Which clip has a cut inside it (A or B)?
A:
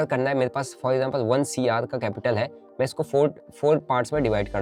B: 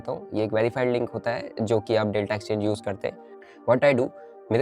B